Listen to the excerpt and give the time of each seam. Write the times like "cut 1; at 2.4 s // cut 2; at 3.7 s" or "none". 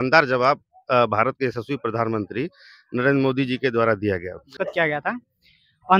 cut 1; at 4.5 s